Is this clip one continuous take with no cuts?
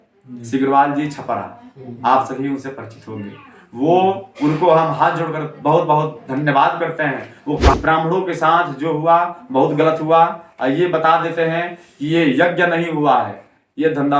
no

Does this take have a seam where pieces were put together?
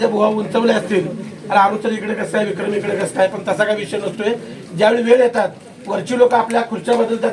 no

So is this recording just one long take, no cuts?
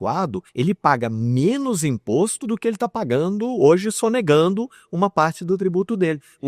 yes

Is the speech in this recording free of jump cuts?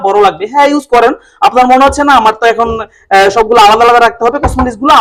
yes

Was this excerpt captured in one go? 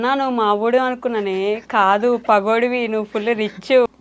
yes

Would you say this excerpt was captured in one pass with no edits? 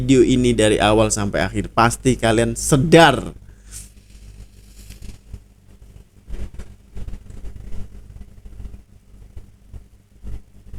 yes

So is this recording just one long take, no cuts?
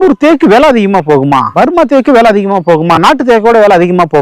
no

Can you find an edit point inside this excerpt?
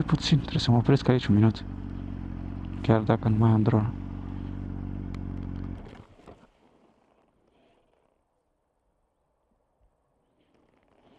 no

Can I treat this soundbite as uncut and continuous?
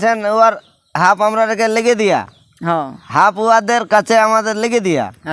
yes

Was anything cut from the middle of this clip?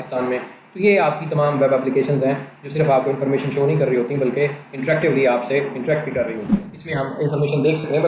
yes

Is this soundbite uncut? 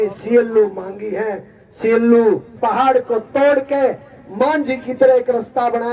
no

